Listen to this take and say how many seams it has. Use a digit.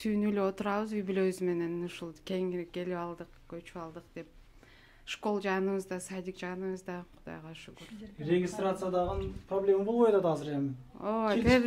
0